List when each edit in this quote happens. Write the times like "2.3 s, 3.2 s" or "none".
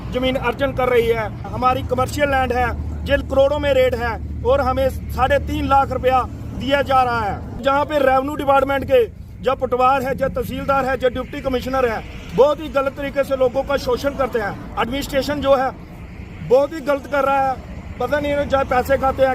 1.5 s, 3.2 s, 7.6 s

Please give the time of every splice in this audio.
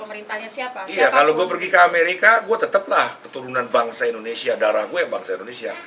none

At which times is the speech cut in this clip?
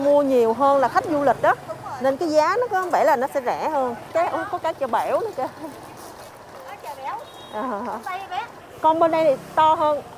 4.1 s, 8.6 s

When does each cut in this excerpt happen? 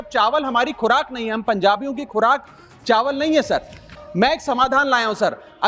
4.0 s

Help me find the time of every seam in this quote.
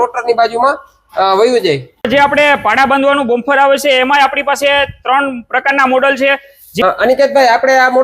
2.0 s, 6.6 s

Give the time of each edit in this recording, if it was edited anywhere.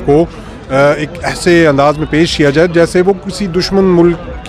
none

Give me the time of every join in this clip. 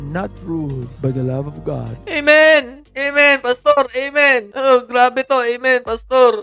none

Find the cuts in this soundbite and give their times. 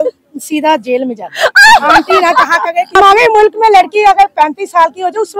2.9 s

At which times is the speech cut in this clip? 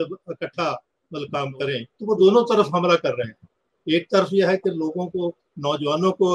1.9 s

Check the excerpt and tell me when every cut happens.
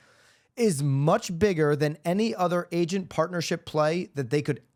none

